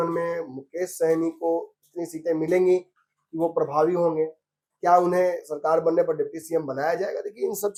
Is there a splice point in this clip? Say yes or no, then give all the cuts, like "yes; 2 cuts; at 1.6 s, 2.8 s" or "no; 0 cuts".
no; 0 cuts